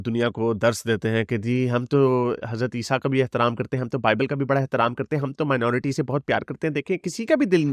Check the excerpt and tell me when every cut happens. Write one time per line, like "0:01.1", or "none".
none